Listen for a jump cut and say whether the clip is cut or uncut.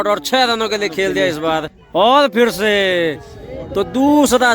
cut